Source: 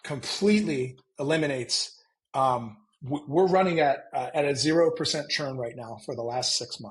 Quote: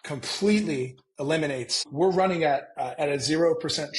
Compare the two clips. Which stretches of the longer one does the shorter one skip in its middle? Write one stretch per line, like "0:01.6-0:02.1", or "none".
0:01.8-0:03.2